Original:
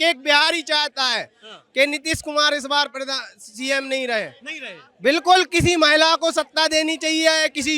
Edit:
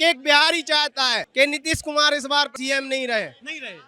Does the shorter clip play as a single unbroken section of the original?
no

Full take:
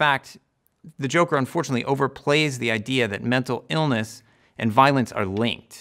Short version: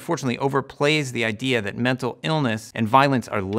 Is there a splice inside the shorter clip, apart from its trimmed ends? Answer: yes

